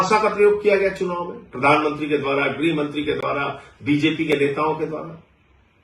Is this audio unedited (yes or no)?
yes